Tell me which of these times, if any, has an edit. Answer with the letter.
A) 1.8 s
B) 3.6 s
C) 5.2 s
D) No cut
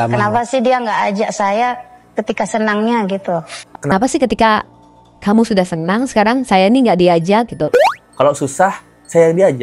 B